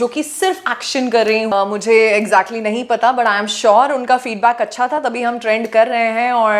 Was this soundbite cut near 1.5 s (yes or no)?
yes